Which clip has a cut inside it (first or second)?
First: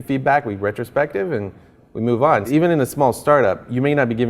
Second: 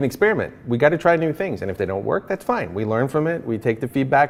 first